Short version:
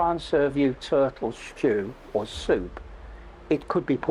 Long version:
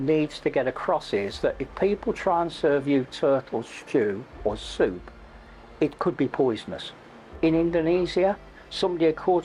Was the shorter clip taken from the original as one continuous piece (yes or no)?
yes